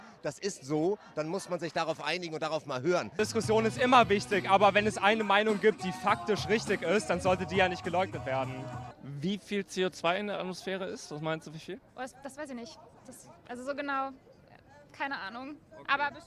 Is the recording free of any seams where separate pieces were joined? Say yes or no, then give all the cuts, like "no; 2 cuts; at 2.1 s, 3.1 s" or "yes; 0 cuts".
no; 2 cuts; at 3.2 s, 8.9 s